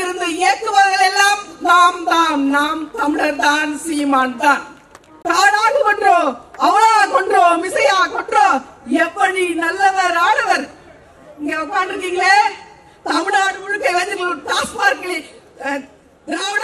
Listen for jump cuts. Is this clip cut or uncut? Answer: cut